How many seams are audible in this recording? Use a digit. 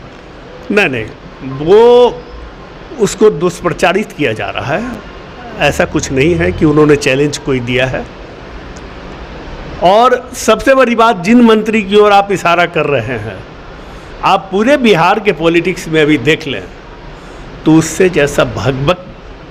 0